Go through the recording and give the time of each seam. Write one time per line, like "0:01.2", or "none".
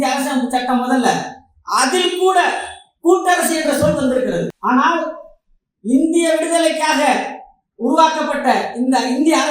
0:04.6